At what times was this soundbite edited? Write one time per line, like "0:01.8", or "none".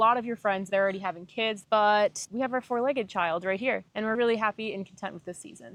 none

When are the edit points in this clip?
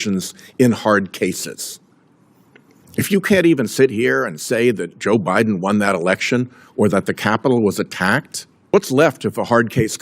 0:08.7

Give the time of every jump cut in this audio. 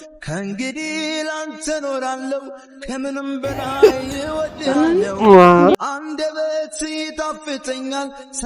none

